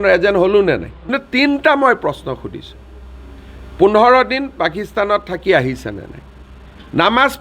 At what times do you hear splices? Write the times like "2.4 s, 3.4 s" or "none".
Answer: 1.1 s